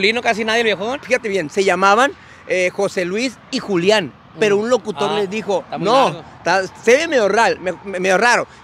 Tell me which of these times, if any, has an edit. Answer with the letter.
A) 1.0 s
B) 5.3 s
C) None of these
A